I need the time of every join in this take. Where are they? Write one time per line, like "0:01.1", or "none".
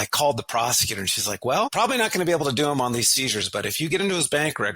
0:01.7